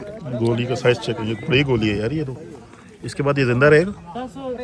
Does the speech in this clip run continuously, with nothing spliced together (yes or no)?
yes